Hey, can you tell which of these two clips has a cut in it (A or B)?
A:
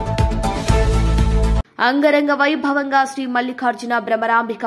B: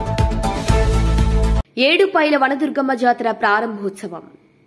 A